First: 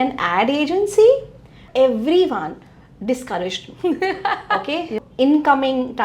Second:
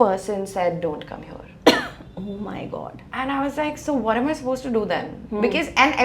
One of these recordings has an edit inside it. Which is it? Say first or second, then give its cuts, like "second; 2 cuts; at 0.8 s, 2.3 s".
first; 2 cuts; at 1.6 s, 5.0 s